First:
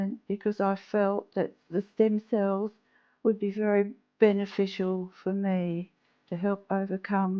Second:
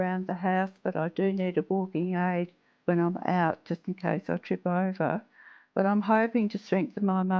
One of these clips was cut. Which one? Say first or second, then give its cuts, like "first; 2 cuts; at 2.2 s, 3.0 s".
first; 1 cut; at 1.6 s